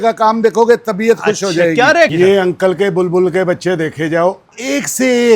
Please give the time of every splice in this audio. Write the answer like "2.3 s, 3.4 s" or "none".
2.1 s